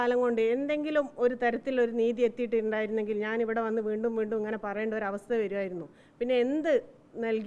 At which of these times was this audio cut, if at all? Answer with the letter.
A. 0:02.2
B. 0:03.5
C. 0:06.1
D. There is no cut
D